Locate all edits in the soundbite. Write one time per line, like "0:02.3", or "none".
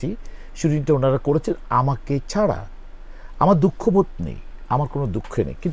none